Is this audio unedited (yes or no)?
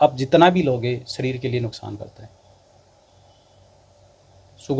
yes